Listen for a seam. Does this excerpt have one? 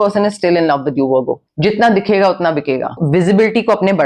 yes; 2 cuts; at 1.4 s, 3.0 s

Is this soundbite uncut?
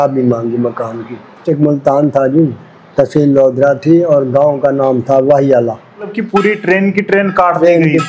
no; 2 cuts; at 1.4 s, 6.2 s

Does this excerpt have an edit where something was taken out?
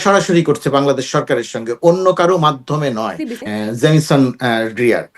yes; 1 cut; at 3.3 s

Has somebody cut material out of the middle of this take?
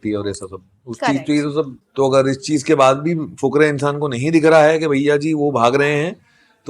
yes; 1 cut; at 1.8 s

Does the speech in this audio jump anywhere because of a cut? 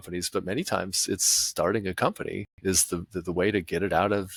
no; 0 cuts

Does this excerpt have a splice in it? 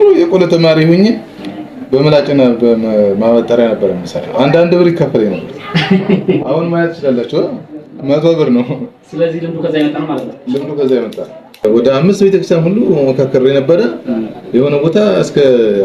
yes; 1 cut; at 11.6 s

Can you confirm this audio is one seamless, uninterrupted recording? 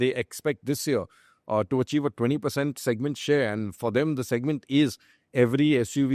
yes; 0 cuts

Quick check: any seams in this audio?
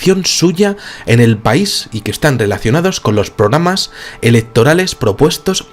yes; 1 cut; at 3.0 s

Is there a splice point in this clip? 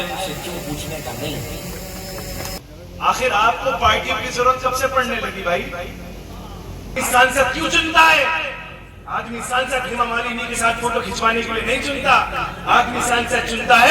yes; 2 cuts; at 2.5 s, 6.9 s

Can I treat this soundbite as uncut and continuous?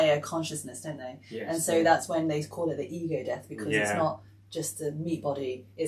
yes; 0 cuts

